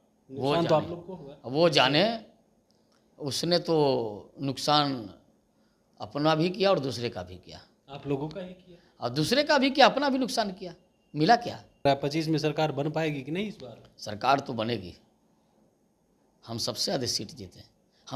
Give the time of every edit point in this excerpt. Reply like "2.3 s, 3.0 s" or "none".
11.8 s